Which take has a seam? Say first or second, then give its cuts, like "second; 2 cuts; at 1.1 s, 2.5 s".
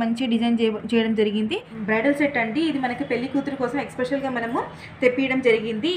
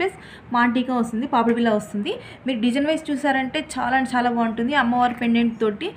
first; 1 cut; at 1.7 s